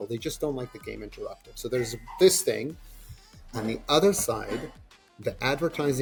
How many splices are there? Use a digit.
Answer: 0